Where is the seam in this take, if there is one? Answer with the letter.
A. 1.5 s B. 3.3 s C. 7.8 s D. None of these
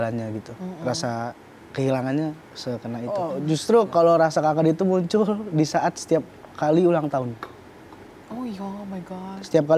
B